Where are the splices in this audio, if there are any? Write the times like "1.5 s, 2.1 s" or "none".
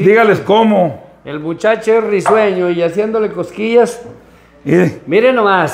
none